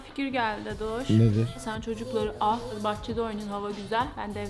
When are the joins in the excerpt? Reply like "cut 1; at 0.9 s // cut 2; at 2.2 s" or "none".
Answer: cut 1; at 1.6 s // cut 2; at 2.7 s